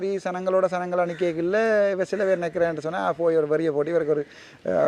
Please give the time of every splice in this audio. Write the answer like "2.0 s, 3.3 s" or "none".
none